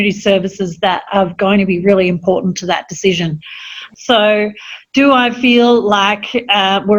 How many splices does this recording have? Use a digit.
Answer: 0